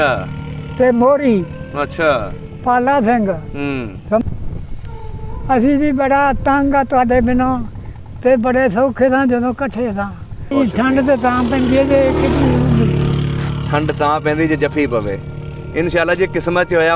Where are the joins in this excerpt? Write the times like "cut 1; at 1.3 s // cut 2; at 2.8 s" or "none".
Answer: cut 1; at 4.2 s // cut 2; at 10.5 s